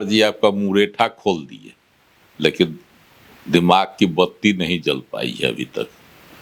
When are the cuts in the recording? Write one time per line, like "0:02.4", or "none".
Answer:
none

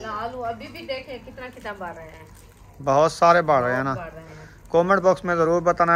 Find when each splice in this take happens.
none

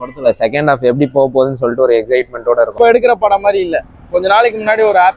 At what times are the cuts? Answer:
0:02.7

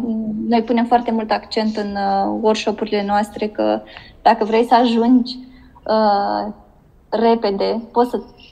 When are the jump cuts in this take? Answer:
none

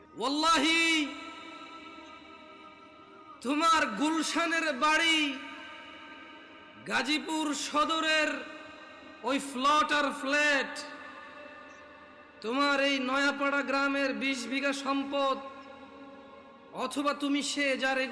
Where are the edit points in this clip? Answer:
none

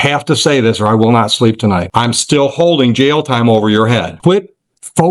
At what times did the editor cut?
0:01.9
0:04.1

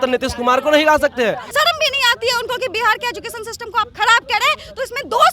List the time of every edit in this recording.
0:01.5

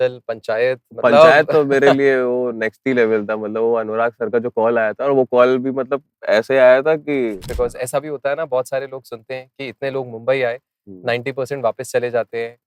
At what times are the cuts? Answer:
0:07.4

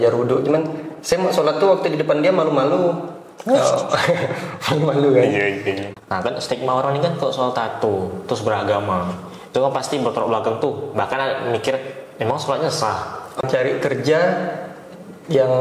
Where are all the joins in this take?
0:05.8
0:13.4

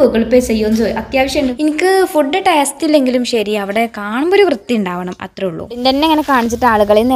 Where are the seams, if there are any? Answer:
0:01.5
0:05.8

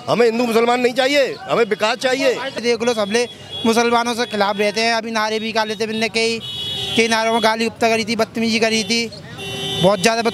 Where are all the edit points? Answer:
0:02.6

